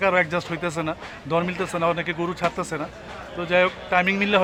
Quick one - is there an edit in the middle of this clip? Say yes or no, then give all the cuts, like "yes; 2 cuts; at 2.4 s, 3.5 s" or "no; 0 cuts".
no; 0 cuts